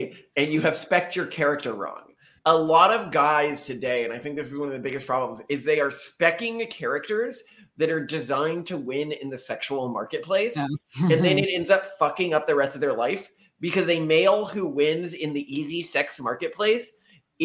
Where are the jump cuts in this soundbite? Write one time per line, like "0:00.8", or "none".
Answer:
0:02.2